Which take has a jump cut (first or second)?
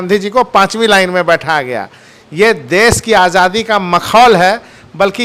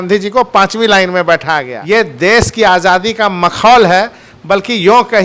second